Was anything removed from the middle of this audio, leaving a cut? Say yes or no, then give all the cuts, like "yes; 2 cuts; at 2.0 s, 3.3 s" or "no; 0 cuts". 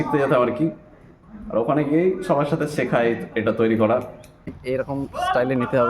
yes; 1 cut; at 4.5 s